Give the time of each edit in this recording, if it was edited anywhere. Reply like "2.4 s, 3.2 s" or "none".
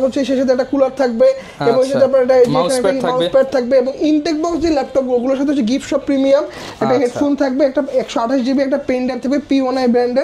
none